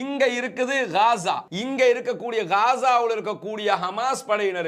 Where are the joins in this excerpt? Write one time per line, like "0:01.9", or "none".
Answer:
0:01.5